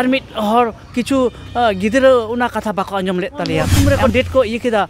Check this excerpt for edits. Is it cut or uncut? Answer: cut